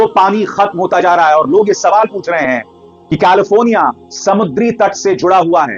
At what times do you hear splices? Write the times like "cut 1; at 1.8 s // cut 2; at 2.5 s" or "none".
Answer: none